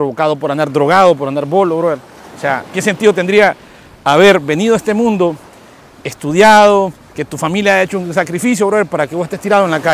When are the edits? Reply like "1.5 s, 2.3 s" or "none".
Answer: none